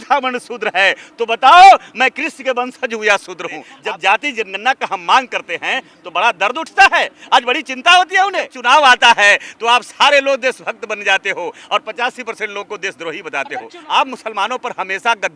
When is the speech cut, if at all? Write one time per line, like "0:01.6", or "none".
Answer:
0:03.7
0:08.5
0:13.8